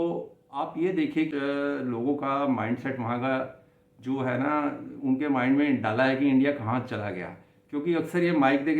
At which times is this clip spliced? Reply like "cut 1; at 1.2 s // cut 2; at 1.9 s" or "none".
cut 1; at 1.3 s